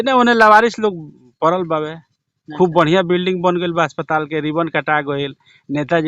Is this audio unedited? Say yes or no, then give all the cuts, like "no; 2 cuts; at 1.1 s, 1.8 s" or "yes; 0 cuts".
yes; 0 cuts